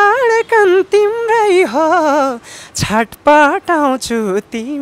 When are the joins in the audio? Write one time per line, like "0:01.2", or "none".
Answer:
none